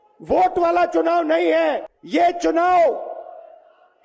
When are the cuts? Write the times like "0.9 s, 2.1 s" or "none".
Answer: 1.9 s